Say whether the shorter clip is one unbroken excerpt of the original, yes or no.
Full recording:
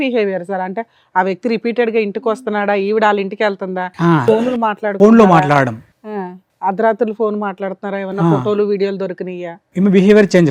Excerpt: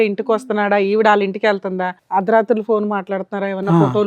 no